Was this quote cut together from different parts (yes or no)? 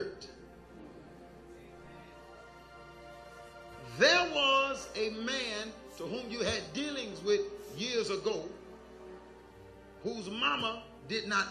yes